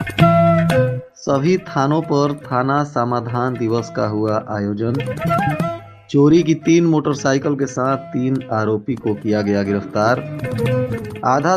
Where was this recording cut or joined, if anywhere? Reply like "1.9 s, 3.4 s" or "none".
1.1 s